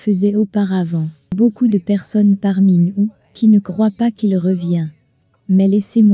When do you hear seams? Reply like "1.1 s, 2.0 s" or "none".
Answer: 1.3 s